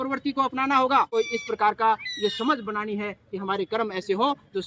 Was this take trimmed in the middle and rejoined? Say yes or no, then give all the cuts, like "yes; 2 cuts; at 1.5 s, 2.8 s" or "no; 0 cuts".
yes; 1 cut; at 1.2 s